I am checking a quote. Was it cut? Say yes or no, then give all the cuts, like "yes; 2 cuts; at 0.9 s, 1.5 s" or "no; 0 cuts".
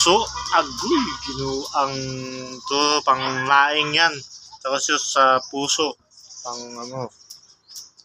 no; 0 cuts